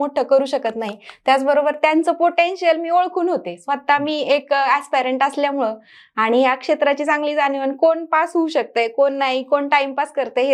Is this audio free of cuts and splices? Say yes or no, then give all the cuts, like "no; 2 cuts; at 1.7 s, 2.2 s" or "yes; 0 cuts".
yes; 0 cuts